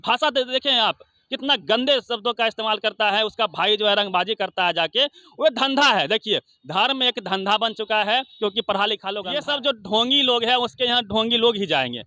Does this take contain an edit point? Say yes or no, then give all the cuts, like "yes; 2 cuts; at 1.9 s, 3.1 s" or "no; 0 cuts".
yes; 1 cut; at 9.1 s